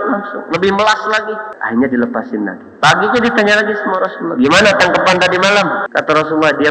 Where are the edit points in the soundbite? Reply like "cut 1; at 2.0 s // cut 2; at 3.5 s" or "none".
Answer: cut 1; at 1.5 s // cut 2; at 5.8 s